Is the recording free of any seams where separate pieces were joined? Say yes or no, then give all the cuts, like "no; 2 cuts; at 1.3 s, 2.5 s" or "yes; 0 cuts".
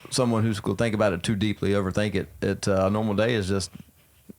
yes; 0 cuts